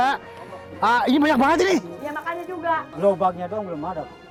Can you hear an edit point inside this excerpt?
no; 0 cuts

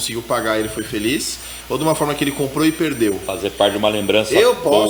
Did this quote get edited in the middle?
no; 0 cuts

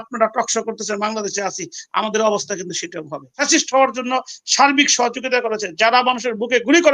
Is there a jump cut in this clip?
yes; 1 cut; at 3.3 s

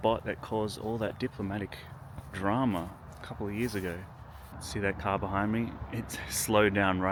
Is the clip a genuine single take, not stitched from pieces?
yes; 0 cuts

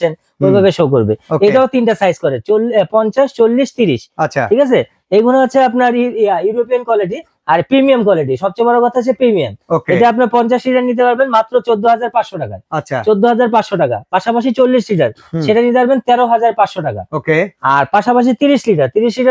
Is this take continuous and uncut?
yes; 0 cuts

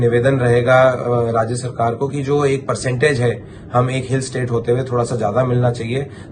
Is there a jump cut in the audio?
no; 0 cuts

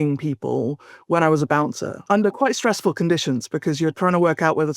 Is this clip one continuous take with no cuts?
no; 1 cut; at 2.0 s

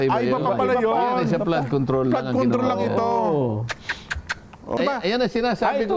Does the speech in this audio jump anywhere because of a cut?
yes; 1 cut; at 4.8 s

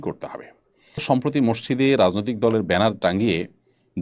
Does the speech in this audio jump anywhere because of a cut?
yes; 1 cut; at 1.0 s

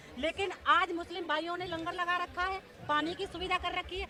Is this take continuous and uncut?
yes; 0 cuts

